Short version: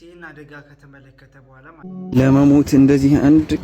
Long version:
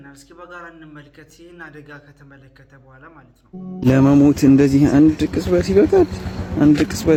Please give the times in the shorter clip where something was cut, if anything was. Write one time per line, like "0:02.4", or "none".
0:01.8